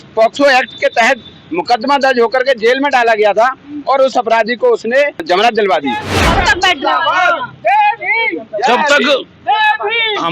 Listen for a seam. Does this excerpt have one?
yes; 2 cuts; at 5.2 s, 6.1 s

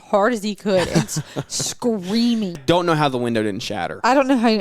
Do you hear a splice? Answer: yes; 1 cut; at 2.6 s

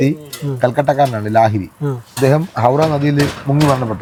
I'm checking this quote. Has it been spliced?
no; 0 cuts

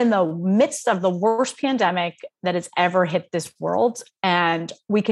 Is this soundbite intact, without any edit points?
yes; 0 cuts

